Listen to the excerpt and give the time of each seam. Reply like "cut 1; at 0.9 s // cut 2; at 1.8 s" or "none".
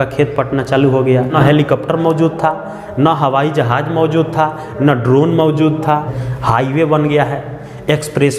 cut 1; at 1.3 s // cut 2; at 6.2 s